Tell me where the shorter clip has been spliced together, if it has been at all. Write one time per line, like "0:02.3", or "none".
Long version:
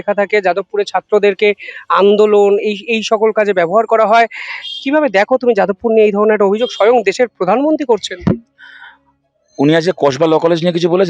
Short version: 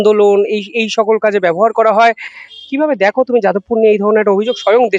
none